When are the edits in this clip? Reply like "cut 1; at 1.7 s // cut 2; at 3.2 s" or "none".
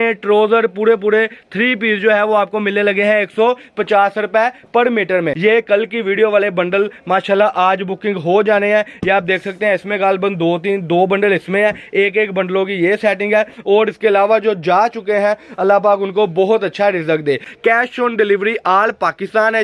cut 1; at 5.3 s // cut 2; at 17.5 s